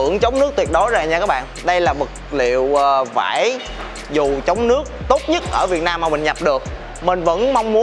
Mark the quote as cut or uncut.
uncut